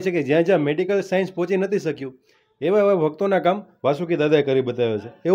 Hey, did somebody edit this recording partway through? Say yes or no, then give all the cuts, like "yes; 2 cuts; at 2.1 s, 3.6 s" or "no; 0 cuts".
no; 0 cuts